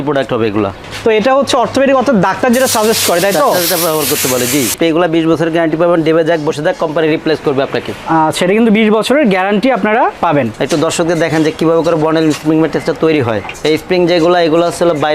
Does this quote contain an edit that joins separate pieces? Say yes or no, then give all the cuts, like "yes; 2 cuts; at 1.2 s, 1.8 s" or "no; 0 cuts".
yes; 2 cuts; at 4.7 s, 10.6 s